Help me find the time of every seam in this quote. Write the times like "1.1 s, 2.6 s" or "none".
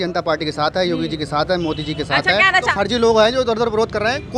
2.7 s